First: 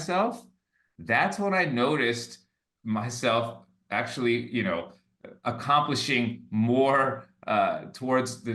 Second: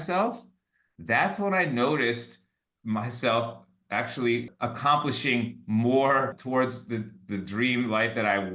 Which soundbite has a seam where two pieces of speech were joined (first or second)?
second